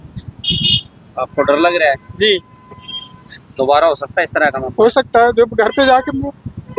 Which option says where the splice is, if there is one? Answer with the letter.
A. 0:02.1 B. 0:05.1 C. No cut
C